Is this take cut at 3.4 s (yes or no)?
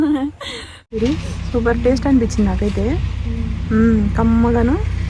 no